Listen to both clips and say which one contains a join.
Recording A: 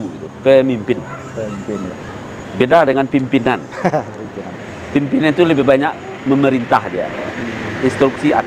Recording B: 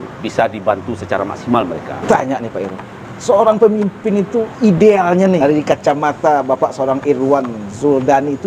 B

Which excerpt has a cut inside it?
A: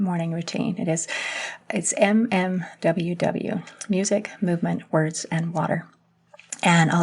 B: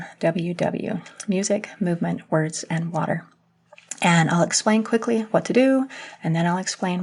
A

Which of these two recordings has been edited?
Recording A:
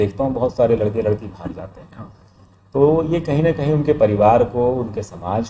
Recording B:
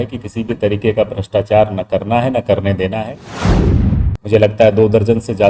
B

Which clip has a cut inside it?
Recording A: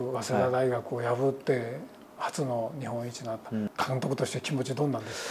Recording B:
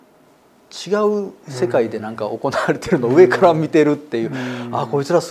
A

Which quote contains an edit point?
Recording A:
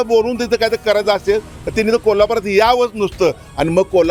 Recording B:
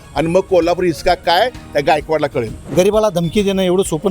B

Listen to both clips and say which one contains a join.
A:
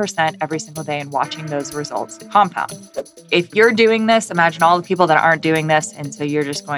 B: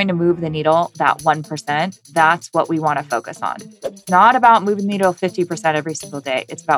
A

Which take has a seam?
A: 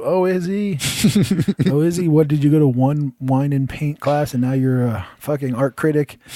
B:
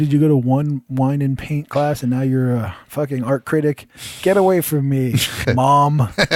B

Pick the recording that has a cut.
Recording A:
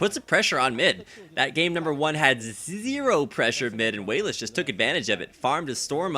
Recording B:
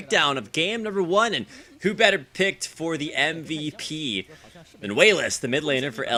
A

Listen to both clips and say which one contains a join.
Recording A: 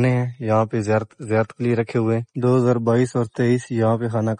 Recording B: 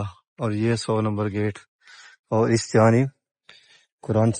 A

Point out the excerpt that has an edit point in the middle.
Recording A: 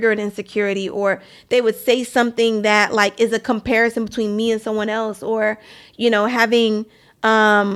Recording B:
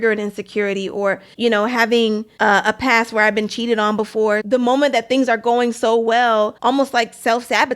B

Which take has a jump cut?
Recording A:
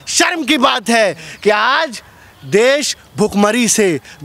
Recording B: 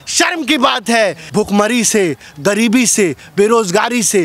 B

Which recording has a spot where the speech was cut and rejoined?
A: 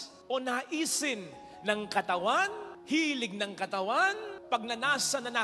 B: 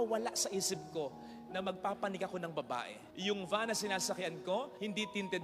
B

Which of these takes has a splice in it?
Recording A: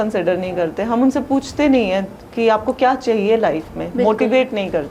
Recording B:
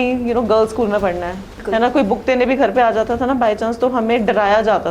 B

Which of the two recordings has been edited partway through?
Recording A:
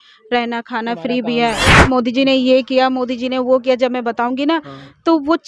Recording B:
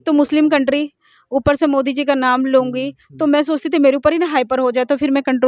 A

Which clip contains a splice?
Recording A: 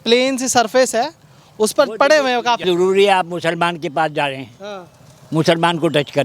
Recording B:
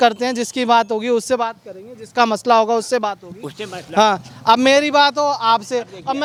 A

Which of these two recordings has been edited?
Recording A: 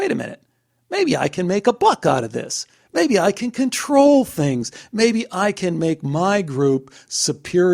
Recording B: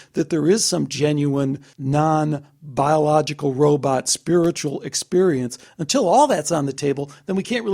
B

